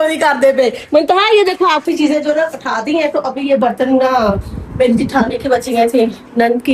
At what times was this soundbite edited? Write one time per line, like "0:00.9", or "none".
0:01.8